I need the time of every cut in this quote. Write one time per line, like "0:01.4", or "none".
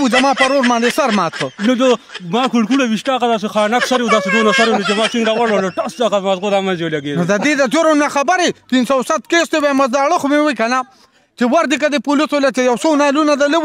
none